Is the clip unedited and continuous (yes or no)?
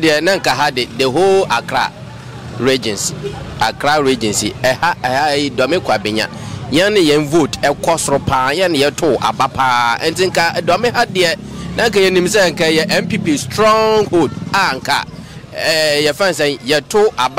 yes